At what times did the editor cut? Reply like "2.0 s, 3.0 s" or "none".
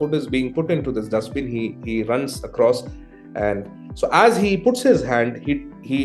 none

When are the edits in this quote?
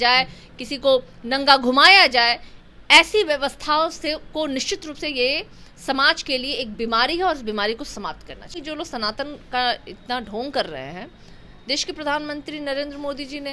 8.6 s

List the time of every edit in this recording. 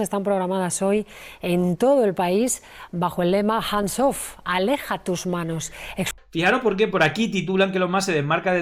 6.2 s

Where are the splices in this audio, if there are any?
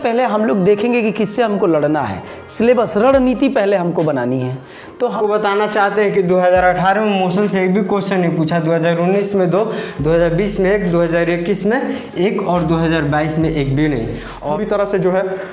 5.1 s, 14.5 s

